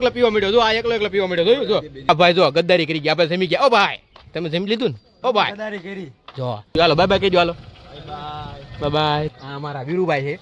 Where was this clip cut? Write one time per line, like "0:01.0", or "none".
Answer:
0:02.1
0:06.7
0:09.3